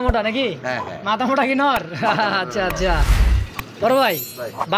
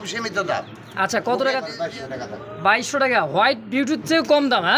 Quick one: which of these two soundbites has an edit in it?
second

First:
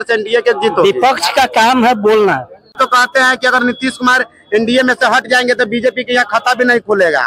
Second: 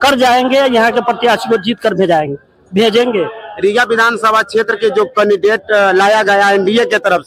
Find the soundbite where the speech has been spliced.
first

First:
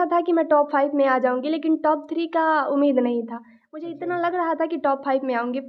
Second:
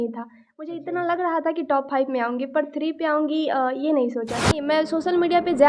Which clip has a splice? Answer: second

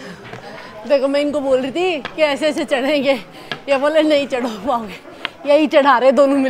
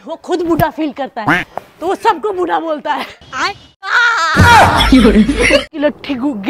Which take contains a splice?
second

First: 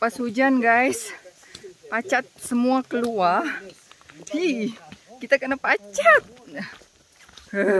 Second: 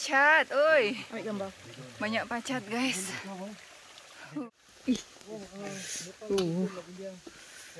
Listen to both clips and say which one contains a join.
second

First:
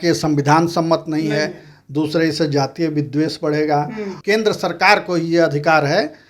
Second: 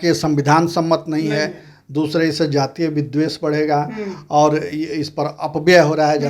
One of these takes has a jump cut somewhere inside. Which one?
first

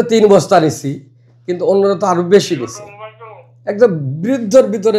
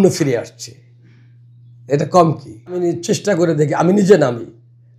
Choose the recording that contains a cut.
second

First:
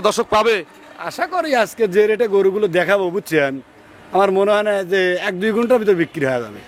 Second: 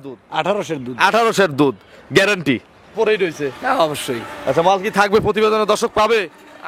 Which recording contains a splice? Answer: second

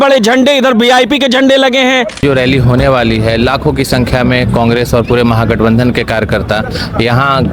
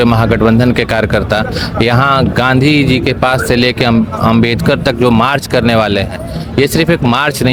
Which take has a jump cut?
first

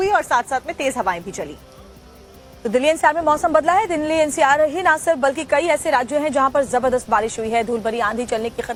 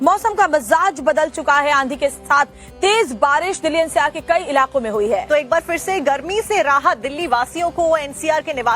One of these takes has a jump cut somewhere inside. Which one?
second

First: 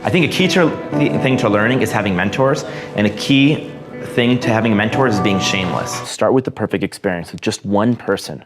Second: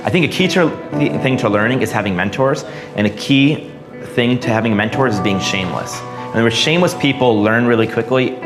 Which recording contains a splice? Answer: first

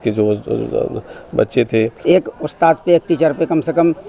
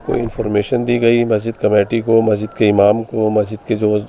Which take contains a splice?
first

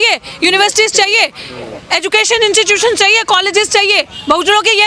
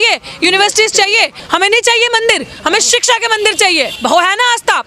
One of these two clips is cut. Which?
second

